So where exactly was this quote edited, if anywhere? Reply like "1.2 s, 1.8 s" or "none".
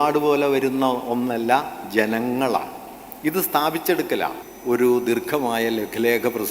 4.4 s